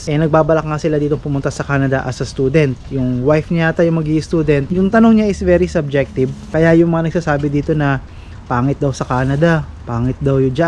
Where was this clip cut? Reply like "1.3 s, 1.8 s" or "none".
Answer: 4.7 s, 6.4 s